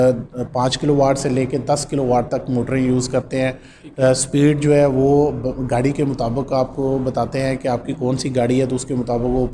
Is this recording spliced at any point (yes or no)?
no